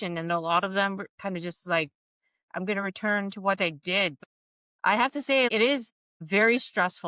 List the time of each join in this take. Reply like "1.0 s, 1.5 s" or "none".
4.2 s, 5.7 s